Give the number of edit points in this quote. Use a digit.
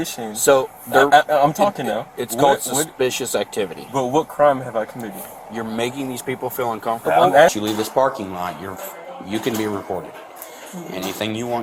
1